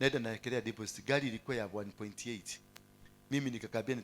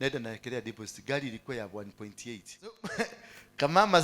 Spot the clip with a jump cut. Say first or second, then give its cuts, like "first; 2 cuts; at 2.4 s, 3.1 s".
second; 1 cut; at 2.8 s